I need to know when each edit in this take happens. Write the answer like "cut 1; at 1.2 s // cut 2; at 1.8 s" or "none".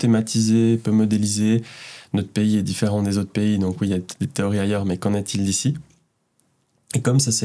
none